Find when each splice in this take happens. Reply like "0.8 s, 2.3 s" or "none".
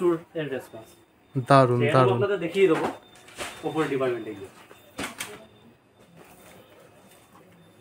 none